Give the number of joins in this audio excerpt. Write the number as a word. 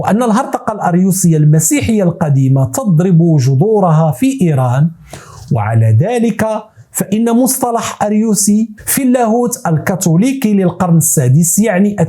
zero